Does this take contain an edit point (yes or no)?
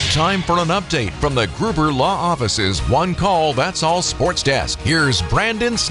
no